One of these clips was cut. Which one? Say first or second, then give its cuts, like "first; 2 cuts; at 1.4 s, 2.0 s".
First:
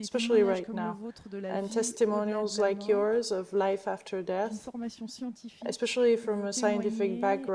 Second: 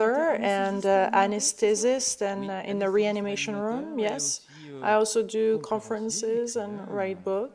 second; 1 cut; at 4.8 s